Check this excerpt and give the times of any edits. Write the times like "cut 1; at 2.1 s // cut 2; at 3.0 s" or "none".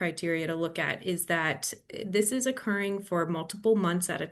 none